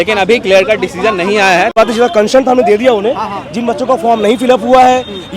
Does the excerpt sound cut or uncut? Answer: cut